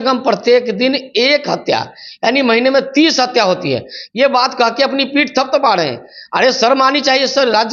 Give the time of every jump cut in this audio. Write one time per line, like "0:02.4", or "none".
none